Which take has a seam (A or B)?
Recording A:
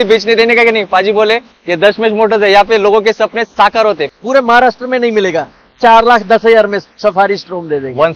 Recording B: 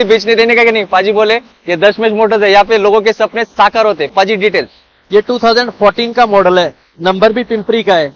A